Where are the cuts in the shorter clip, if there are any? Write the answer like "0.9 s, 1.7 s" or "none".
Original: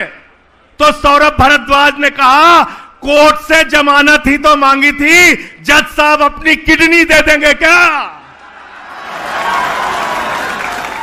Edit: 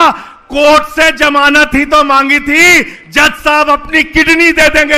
none

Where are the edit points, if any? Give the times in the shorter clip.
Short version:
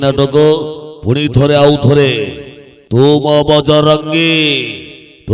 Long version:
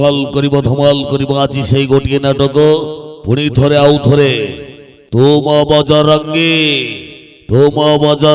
none

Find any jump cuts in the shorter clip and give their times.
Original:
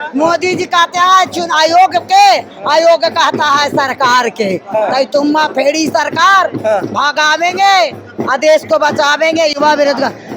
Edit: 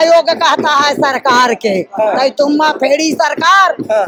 none

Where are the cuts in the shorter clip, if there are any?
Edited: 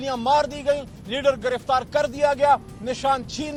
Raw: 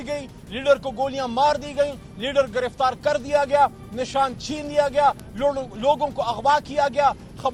none

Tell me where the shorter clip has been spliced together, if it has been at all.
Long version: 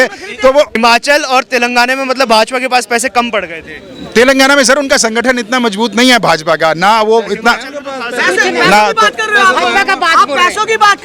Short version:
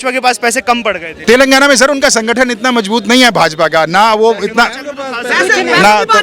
1.1 s

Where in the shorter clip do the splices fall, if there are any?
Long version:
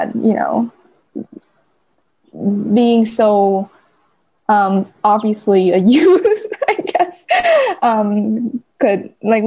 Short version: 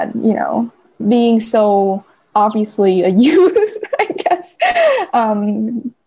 1.0 s, 2.2 s

